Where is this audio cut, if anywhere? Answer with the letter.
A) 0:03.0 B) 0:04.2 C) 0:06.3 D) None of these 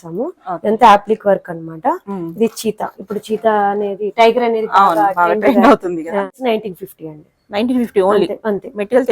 C